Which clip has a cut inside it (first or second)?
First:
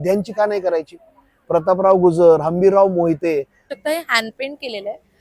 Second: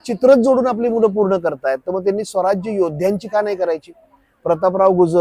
first